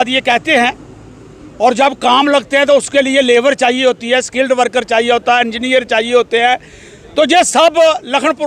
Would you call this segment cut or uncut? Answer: uncut